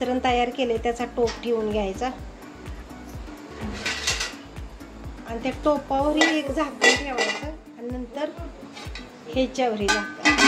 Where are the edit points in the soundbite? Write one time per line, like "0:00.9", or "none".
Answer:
none

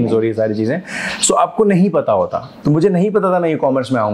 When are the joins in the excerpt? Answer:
0:02.6

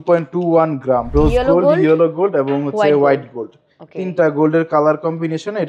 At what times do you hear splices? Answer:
0:01.1

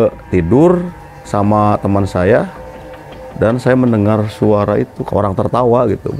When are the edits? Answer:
0:05.0

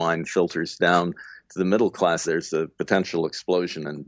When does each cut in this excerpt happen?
0:02.2

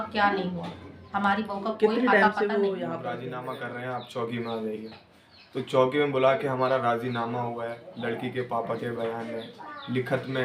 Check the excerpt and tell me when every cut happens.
0:03.2

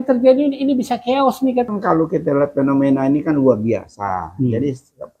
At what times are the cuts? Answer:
0:01.7

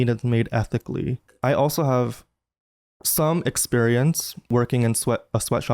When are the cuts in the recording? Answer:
0:01.3
0:04.5

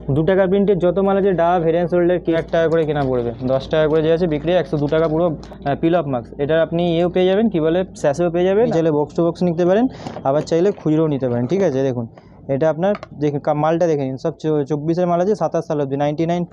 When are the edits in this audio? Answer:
0:02.4
0:05.4
0:08.7

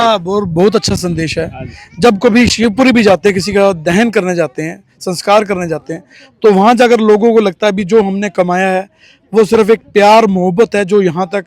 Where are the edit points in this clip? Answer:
none

